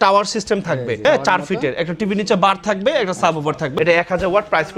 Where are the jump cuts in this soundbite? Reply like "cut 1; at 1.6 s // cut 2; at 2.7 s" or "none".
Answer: cut 1; at 1.0 s // cut 2; at 3.7 s